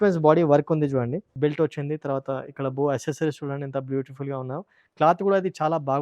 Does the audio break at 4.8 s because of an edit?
no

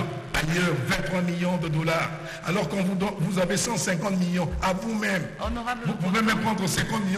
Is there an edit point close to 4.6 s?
no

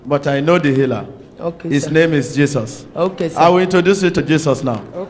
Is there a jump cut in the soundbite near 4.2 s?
yes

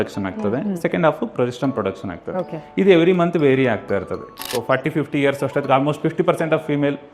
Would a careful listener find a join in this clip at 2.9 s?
no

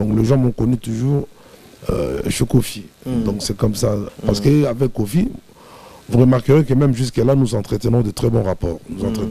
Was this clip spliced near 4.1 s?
yes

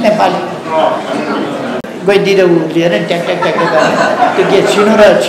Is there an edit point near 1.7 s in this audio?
yes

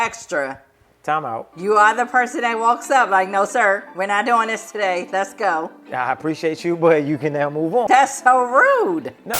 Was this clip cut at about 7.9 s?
yes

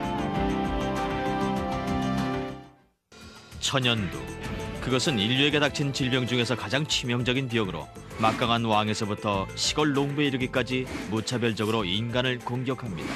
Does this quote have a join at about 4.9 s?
yes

